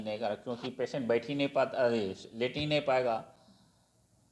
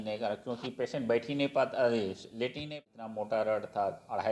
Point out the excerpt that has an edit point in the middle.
second; 1 cut; at 2.7 s

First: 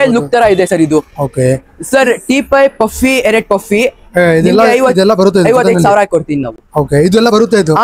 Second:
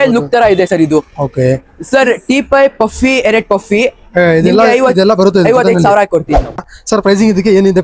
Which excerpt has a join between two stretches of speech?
second; 1 cut; at 6.6 s

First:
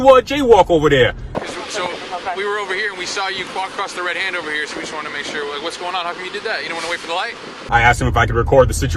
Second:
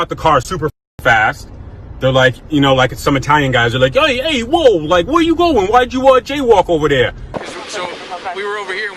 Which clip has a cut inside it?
first; 1 cut; at 7.7 s

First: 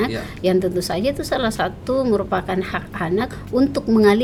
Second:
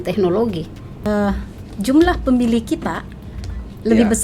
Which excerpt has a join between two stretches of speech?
second; 1 cut; at 0.9 s

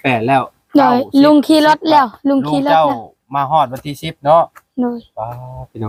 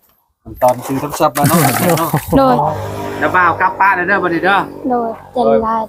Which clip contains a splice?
second; 1 cut; at 2.7 s

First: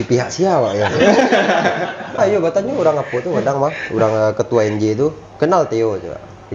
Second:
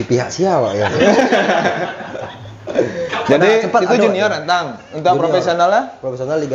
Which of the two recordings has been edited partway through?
first; 1 cut; at 2.2 s

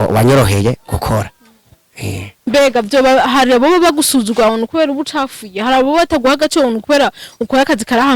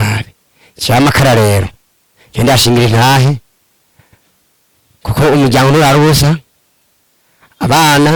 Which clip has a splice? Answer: first; 1 cut; at 2.3 s

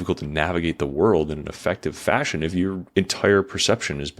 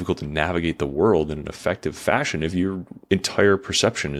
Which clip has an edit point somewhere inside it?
first; 1 cut; at 2.8 s

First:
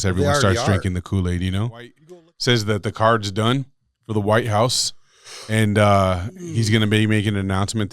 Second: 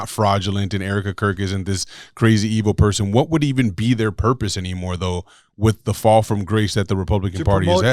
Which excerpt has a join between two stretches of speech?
first; 1 cut; at 2.0 s

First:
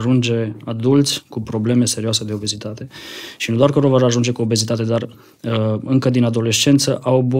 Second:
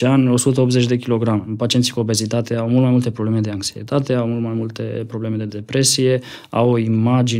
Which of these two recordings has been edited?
second; 1 cut; at 1.5 s

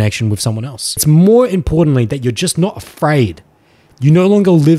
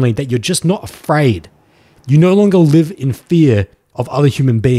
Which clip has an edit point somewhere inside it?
first; 1 cut; at 1.0 s

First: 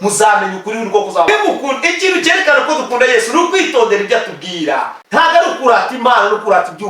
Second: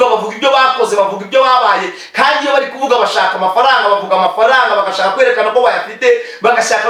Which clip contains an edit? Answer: first; 1 cut; at 1.3 s

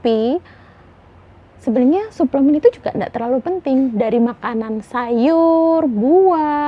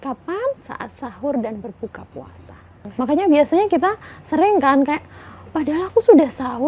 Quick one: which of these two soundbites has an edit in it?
second; 1 cut; at 2.9 s

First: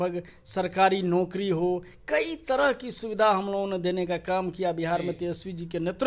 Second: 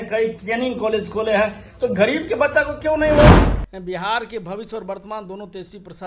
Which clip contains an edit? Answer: second; 1 cut; at 3.5 s

